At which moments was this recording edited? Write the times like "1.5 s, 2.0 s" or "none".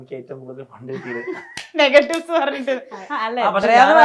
none